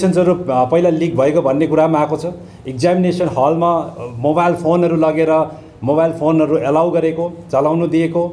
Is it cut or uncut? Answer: uncut